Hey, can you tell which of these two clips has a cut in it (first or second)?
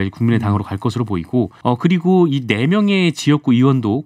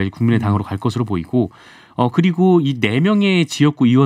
first